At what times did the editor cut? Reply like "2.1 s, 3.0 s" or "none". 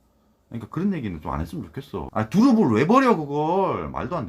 2.1 s